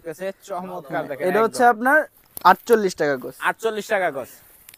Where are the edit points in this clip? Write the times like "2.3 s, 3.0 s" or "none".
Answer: none